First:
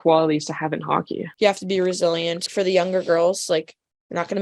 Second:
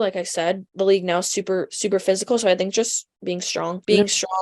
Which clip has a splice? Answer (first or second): first